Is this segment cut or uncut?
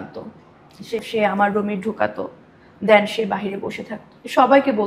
cut